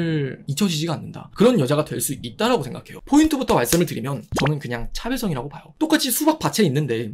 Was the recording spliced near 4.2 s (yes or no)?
no